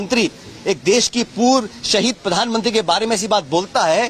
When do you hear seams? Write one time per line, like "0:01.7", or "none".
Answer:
none